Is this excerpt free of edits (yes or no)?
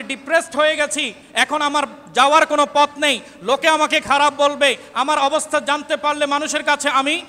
yes